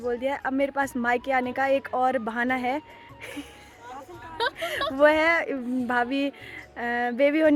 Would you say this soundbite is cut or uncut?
uncut